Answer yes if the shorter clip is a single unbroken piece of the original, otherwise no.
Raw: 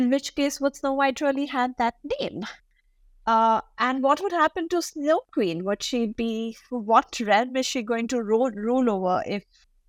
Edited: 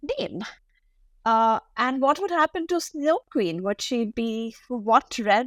yes